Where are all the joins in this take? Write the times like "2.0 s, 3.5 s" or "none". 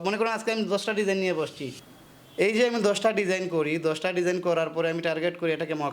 1.6 s